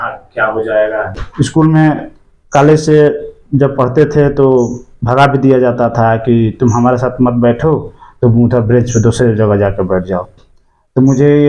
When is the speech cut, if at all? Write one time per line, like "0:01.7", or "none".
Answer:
0:01.2